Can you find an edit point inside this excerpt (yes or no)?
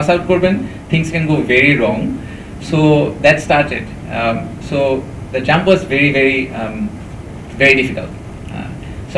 no